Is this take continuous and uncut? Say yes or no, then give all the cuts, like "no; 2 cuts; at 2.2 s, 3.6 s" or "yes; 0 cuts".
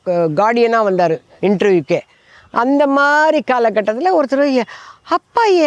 yes; 0 cuts